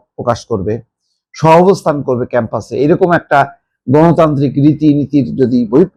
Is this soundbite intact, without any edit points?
yes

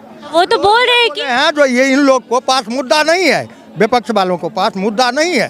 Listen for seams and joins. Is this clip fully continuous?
yes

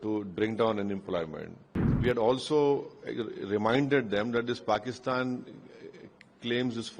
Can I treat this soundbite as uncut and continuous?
no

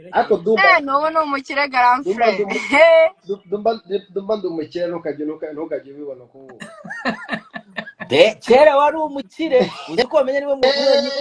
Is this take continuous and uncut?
yes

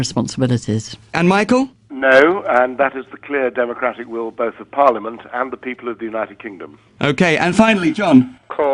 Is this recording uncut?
no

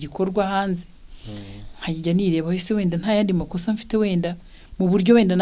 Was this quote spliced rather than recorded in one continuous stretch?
no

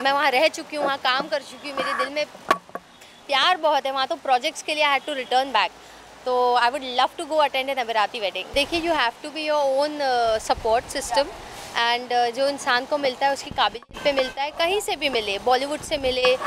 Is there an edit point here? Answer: no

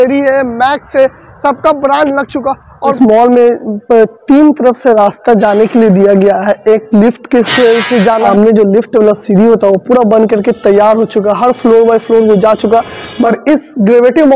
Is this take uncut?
no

